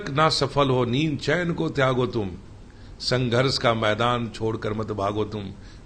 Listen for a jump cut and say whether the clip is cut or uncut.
uncut